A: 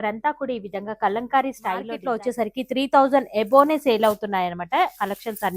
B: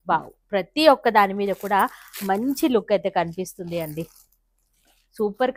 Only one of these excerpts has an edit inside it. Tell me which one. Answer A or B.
A